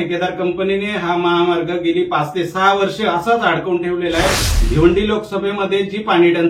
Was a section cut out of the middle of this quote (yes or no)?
yes